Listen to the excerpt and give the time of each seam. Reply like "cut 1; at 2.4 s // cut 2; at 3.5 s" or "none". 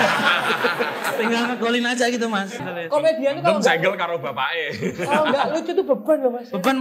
cut 1; at 2.6 s